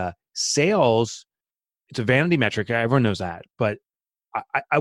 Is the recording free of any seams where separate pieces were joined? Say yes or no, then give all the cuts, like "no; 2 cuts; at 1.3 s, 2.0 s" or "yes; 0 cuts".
yes; 0 cuts